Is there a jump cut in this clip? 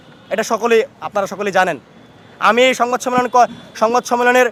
no; 0 cuts

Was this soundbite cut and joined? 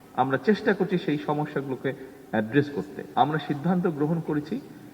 yes; 1 cut; at 3.0 s

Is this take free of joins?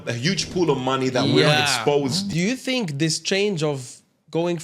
no; 1 cut; at 2.3 s

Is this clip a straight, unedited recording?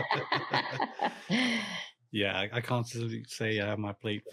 yes; 0 cuts

